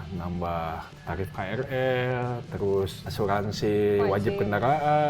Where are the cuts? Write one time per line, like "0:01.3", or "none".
0:00.9
0:03.0